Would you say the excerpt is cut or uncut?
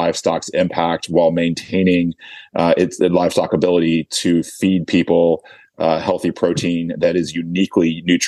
uncut